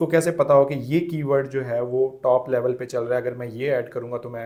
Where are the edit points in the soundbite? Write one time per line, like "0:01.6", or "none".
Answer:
none